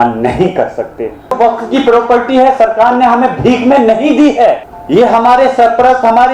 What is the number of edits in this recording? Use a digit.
2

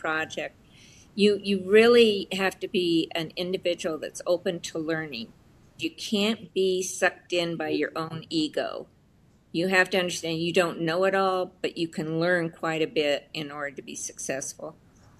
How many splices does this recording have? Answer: 1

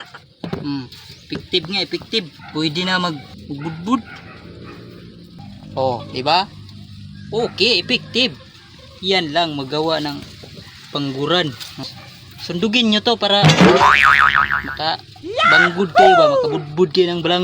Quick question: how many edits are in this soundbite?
2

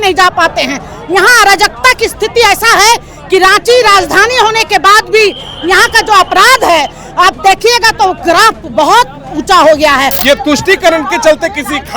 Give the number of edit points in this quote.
1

